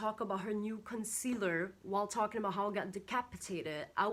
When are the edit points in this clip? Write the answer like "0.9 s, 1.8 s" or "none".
none

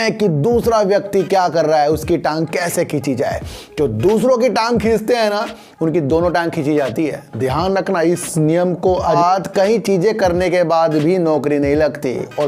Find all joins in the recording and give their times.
9.1 s

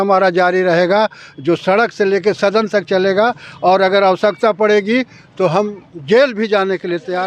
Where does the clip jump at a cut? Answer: none

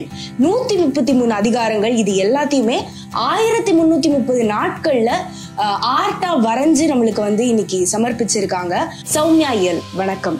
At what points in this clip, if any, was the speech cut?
9.0 s

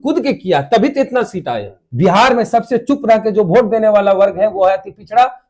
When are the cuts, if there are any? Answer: 1.8 s

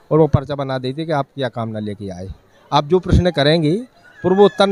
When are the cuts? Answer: none

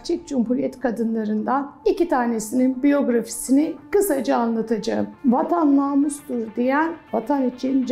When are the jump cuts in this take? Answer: 5.1 s

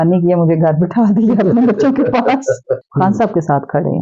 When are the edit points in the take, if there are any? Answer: 2.8 s

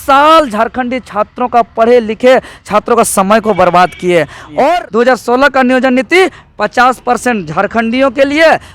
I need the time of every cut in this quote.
4.8 s

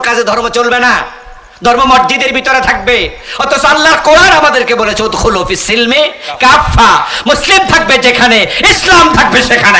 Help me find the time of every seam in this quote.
none

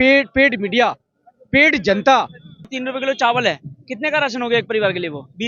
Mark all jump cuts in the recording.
2.8 s

